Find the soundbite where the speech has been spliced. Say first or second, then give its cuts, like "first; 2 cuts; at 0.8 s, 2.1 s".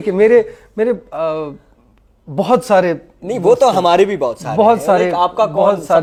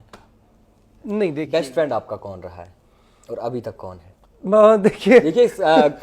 second; 1 cut; at 1.5 s